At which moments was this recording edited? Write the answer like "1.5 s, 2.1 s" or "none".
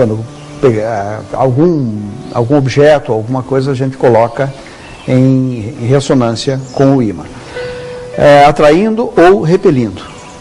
1.7 s